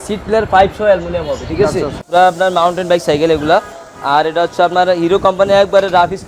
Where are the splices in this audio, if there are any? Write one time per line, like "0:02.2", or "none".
0:02.0